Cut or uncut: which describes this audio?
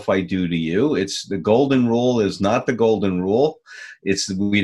uncut